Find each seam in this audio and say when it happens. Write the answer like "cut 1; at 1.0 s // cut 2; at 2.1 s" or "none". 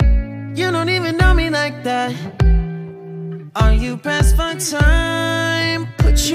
none